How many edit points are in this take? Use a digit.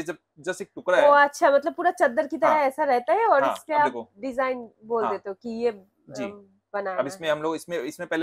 0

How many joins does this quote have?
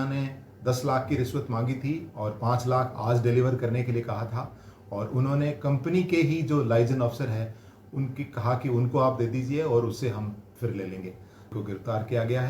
1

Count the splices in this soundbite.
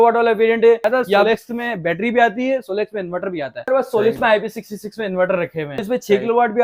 3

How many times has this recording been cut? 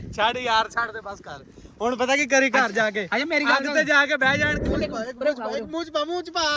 1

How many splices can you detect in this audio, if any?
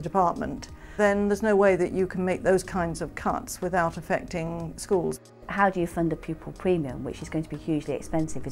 2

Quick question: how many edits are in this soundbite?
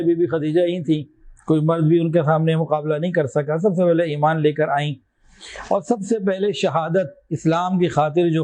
0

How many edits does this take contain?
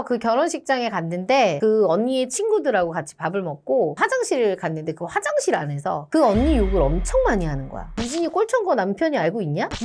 1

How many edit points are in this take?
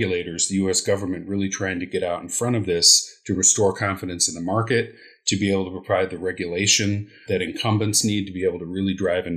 0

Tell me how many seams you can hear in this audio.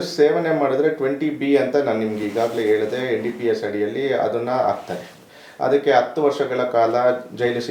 0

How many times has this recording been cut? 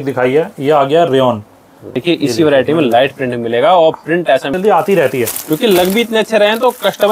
2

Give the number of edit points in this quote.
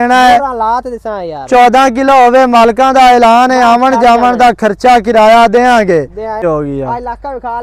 1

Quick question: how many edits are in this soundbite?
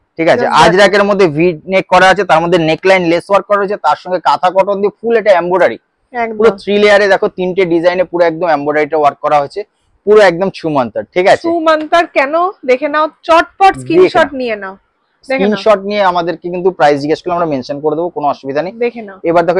0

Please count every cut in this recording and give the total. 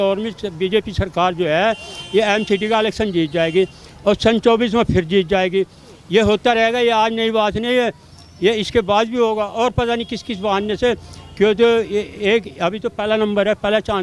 0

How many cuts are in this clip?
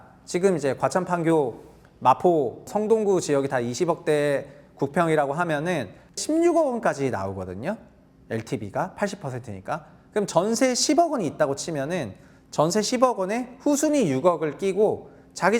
2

